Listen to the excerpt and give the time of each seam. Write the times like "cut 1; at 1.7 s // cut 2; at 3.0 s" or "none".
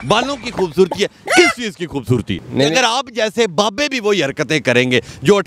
cut 1; at 2.4 s